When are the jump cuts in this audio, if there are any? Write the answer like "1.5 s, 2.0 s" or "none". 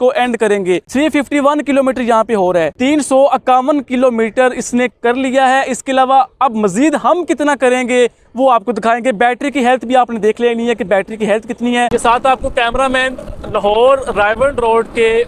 11.9 s